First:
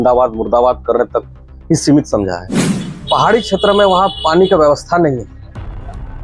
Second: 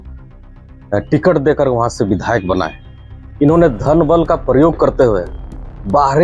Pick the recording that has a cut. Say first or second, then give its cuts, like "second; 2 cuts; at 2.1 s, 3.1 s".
first; 1 cut; at 2.9 s